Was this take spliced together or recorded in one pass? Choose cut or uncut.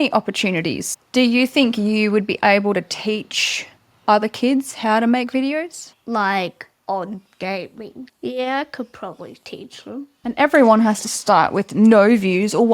cut